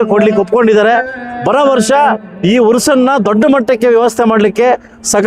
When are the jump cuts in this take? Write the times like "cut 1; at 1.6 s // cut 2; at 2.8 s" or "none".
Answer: none